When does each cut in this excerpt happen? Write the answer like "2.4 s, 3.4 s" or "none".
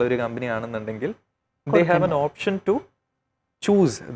none